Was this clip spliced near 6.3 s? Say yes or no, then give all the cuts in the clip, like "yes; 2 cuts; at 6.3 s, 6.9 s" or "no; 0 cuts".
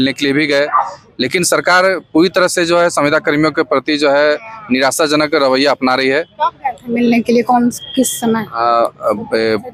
no; 0 cuts